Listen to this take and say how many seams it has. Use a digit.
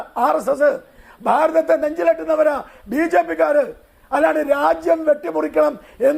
1